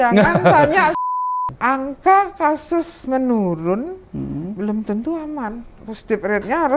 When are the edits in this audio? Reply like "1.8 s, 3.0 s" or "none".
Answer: 1.0 s